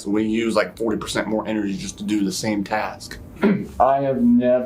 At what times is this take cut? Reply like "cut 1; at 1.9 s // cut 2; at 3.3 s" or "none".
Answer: cut 1; at 3.4 s